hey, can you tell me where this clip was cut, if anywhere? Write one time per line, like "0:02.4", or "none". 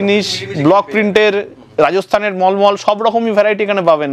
none